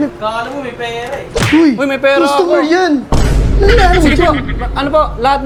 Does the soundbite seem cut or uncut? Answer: uncut